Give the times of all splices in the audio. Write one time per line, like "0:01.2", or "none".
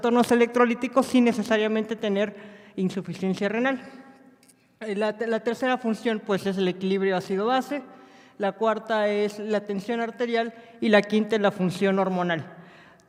none